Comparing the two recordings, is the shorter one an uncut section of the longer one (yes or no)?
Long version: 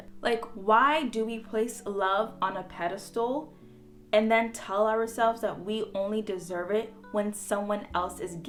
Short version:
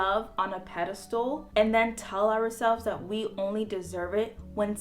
no